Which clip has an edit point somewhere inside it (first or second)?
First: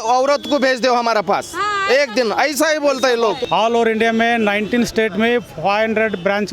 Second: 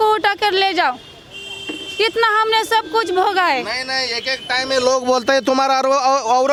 first